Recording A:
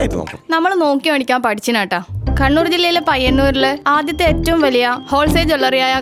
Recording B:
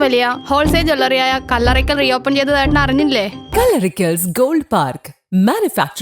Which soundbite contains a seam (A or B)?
B